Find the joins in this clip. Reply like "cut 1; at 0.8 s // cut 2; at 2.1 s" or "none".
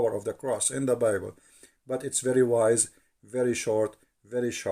none